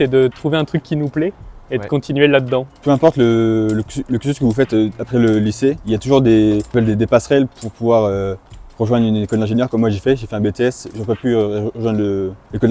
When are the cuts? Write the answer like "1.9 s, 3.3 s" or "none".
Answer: none